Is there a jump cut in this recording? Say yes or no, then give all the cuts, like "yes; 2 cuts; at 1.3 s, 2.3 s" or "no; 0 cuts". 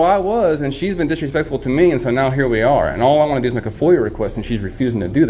no; 0 cuts